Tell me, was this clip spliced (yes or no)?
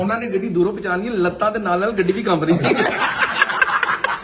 yes